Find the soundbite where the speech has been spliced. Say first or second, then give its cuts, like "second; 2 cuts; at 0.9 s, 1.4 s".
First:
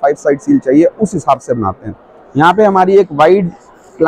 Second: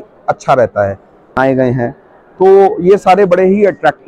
second; 1 cut; at 1.4 s